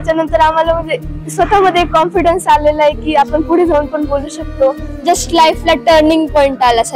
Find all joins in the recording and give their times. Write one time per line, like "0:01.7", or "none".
none